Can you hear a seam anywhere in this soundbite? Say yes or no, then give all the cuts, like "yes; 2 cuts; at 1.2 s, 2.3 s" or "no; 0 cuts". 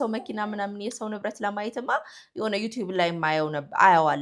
no; 0 cuts